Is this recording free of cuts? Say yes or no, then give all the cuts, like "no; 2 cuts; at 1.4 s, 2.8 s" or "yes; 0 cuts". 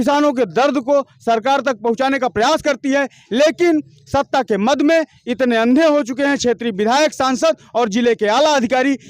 yes; 0 cuts